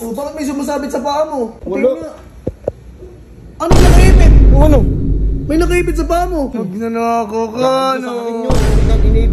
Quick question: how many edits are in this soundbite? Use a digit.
2